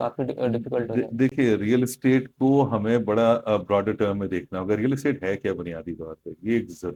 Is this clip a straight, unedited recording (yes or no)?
yes